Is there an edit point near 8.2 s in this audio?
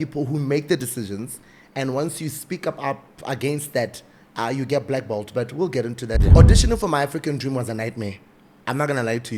no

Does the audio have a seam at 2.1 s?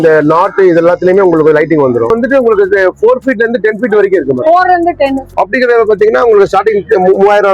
yes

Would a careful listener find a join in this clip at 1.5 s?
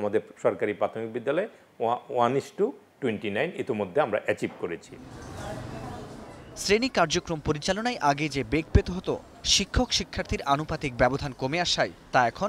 no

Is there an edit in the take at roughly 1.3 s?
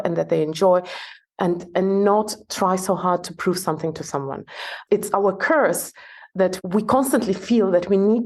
no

